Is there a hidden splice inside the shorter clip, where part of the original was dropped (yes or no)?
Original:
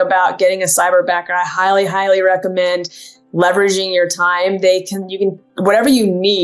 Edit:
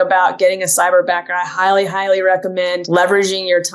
yes